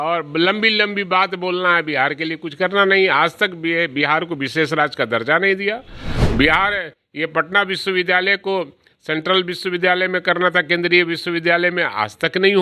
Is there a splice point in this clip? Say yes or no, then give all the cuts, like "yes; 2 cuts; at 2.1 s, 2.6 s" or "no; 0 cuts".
no; 0 cuts